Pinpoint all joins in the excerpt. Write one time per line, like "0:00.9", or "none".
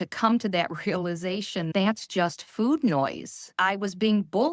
0:01.7
0:03.5